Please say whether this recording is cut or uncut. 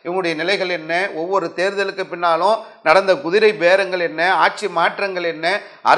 uncut